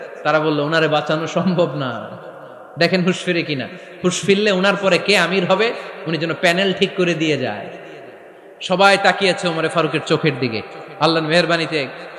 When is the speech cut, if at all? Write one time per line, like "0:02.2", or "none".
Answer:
none